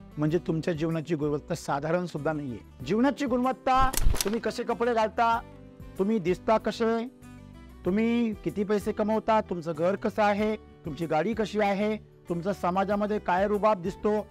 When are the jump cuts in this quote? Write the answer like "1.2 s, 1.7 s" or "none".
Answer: none